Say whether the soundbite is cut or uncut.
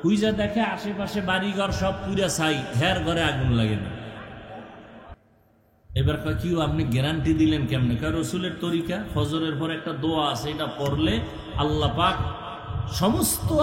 cut